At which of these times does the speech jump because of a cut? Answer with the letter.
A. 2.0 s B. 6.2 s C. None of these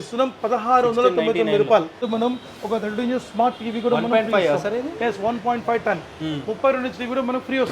A